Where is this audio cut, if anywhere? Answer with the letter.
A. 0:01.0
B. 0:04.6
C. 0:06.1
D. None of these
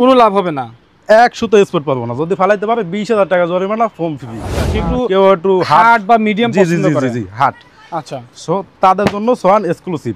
B